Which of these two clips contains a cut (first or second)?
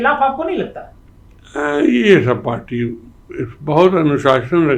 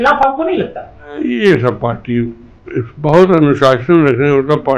second